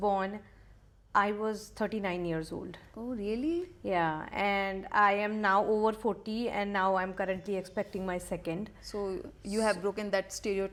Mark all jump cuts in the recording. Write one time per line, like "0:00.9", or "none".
none